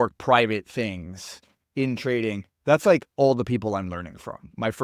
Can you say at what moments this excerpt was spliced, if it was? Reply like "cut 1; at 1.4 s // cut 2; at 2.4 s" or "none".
none

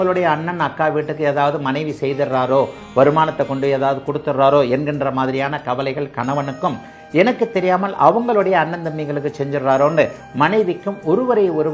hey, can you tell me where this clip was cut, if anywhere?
none

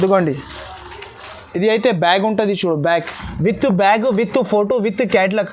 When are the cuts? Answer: cut 1; at 3.2 s

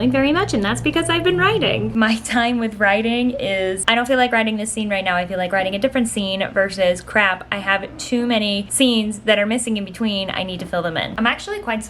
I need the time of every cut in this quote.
cut 1; at 1.9 s // cut 2; at 3.8 s // cut 3; at 8.7 s // cut 4; at 11.1 s

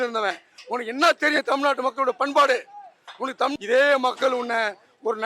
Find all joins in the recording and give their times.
cut 1; at 3.5 s

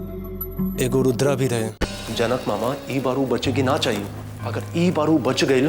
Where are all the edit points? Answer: cut 1; at 1.8 s

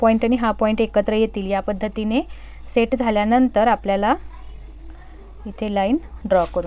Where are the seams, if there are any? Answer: none

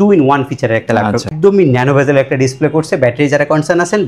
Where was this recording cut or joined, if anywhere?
cut 1; at 1.3 s

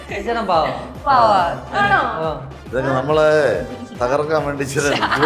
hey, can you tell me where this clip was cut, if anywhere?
cut 1; at 2.6 s

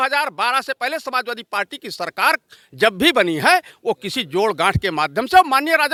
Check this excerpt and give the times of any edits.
none

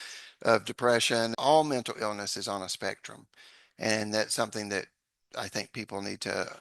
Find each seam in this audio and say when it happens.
cut 1; at 1.3 s

